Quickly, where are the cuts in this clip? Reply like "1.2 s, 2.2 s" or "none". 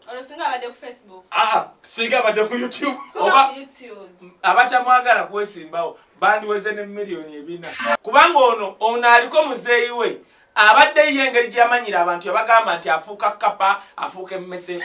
7.8 s